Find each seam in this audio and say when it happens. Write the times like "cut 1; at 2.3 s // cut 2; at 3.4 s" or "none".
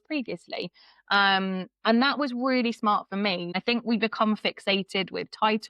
cut 1; at 3.5 s